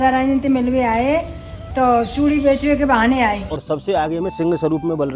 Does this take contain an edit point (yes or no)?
yes